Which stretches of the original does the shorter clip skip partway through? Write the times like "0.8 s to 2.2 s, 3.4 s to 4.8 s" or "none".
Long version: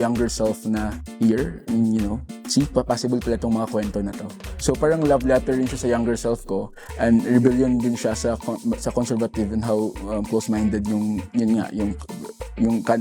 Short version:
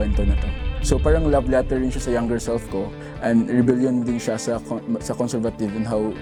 none